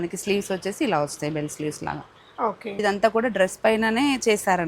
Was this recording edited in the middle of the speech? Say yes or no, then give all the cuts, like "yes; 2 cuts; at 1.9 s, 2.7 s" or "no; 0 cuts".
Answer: yes; 1 cut; at 2.8 s